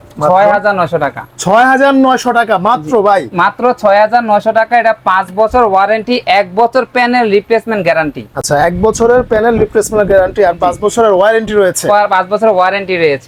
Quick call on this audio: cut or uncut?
uncut